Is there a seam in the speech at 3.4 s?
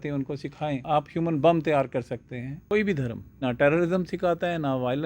yes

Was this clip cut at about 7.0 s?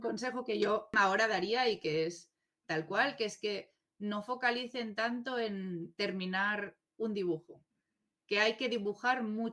no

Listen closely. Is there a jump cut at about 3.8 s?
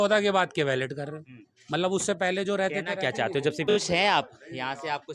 yes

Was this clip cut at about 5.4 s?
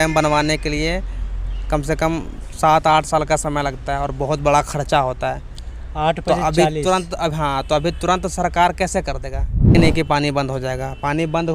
no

